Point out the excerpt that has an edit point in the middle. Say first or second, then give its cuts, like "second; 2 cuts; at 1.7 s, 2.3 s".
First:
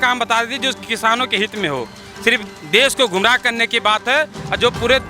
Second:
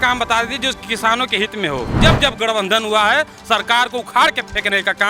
second; 1 cut; at 2.0 s